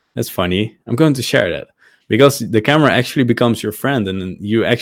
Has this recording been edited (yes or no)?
no